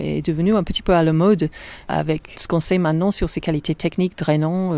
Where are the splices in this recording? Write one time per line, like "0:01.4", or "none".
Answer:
0:01.9